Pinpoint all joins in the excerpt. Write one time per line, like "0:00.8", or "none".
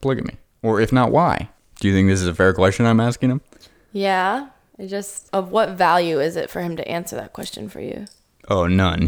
0:05.2